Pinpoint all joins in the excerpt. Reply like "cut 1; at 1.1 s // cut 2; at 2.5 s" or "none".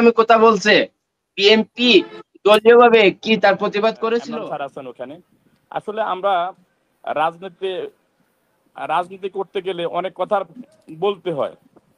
cut 1; at 4.3 s